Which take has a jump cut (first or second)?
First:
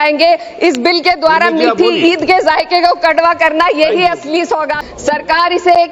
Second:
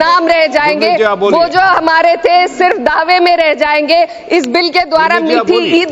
first